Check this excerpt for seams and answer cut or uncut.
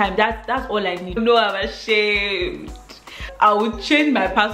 cut